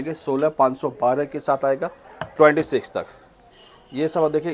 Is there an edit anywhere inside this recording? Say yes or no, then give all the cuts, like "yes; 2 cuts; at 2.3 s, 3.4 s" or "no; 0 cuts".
no; 0 cuts